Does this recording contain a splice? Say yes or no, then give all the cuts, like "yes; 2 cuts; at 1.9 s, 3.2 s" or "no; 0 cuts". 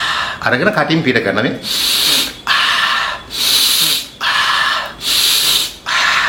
no; 0 cuts